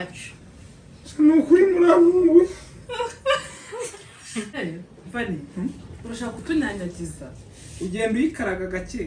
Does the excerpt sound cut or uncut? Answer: cut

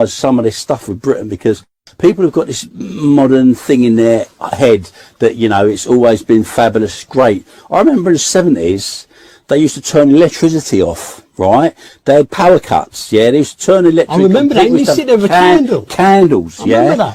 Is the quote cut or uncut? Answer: uncut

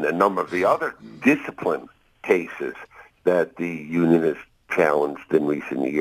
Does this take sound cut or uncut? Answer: uncut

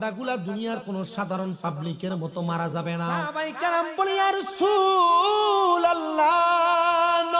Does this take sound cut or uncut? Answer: cut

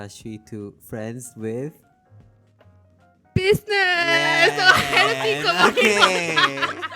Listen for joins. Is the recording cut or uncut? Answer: uncut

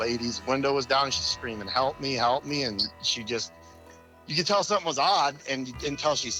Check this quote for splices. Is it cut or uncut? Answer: uncut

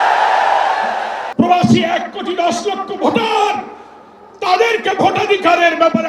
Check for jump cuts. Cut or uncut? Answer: cut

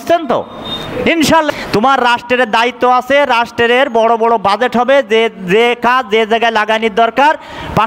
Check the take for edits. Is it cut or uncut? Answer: cut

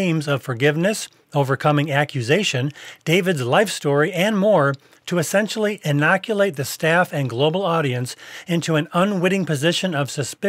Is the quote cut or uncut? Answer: uncut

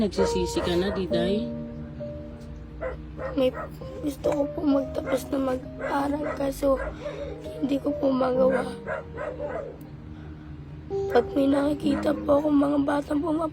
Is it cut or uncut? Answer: uncut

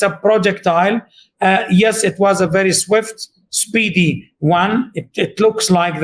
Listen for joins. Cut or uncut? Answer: uncut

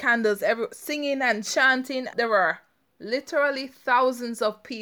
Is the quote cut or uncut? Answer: cut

